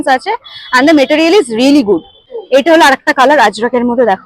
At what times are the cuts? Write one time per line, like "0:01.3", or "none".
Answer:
0:02.3